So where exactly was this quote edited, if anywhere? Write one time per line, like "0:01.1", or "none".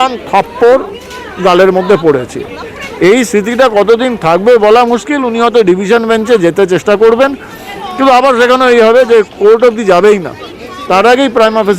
none